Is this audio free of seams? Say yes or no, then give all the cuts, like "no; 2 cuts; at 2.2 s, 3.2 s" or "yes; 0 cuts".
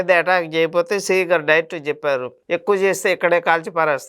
yes; 0 cuts